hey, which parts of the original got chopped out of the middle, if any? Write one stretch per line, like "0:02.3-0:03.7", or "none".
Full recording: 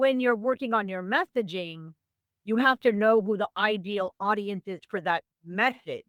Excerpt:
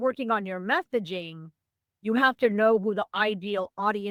none